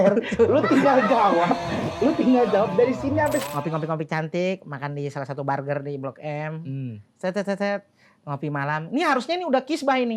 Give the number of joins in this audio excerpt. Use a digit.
1